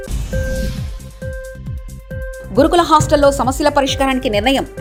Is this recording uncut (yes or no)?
yes